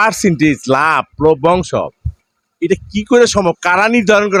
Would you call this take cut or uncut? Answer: uncut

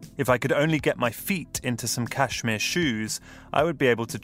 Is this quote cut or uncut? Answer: uncut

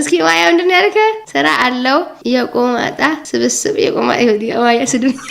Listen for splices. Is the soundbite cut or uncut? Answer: uncut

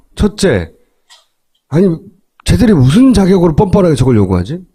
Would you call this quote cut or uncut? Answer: uncut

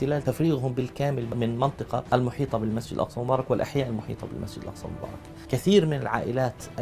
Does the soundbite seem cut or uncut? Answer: cut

